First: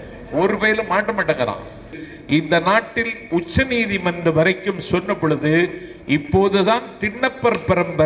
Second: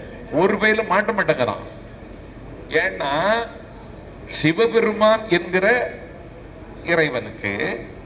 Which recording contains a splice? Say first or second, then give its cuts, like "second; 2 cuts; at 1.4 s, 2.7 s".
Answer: first; 1 cut; at 2.1 s